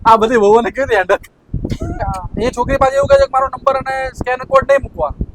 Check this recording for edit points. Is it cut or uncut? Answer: cut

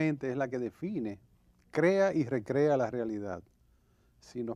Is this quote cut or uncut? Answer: cut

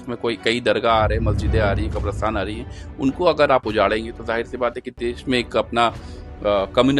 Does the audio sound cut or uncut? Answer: uncut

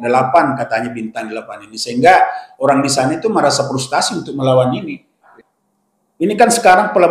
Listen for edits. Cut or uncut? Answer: cut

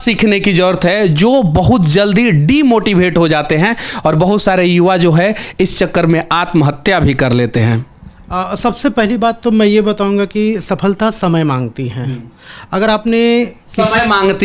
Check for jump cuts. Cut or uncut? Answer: uncut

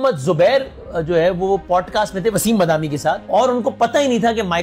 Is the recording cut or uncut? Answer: cut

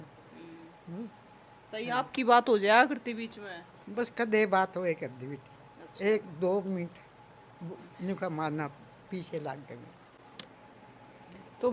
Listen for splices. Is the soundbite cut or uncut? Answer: uncut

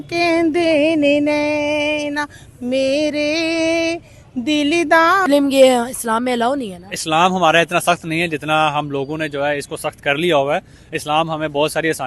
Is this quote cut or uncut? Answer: cut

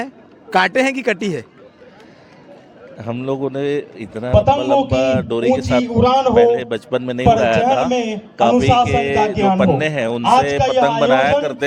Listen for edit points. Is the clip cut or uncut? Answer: uncut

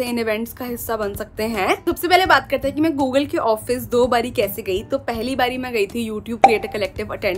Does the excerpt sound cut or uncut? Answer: uncut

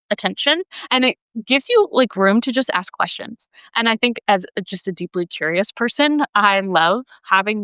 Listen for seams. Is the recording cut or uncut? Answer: uncut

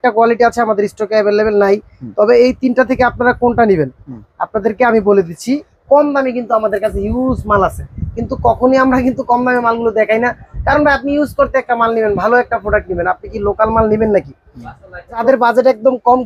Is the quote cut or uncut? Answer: cut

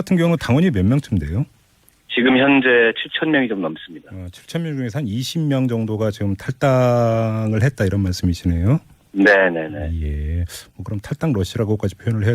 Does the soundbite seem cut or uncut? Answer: cut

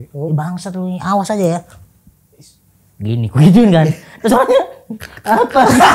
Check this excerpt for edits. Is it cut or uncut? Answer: uncut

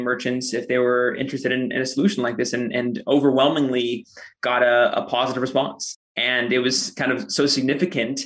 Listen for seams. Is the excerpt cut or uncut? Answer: cut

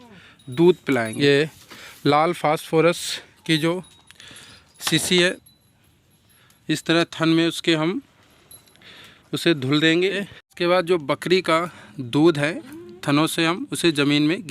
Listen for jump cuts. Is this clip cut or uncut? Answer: cut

